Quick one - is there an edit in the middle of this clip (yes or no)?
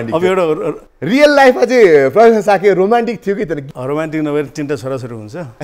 yes